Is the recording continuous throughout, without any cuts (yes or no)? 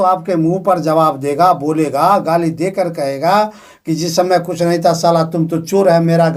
yes